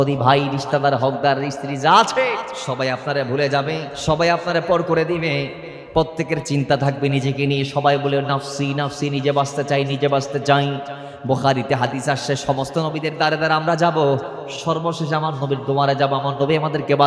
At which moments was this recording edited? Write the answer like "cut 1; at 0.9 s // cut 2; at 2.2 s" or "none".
cut 1; at 2.6 s // cut 2; at 3.9 s